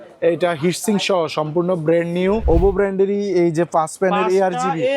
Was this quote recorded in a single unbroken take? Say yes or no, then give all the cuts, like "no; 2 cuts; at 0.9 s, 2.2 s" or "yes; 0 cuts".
no; 1 cut; at 2.4 s